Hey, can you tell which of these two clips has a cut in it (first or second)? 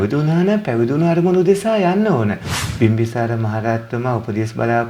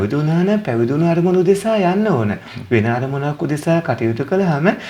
first